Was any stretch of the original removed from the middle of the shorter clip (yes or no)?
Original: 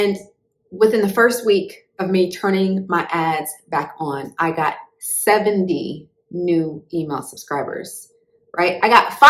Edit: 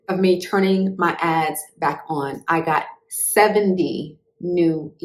no